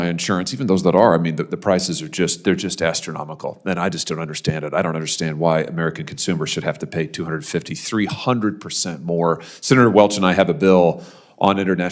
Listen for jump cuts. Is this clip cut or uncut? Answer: uncut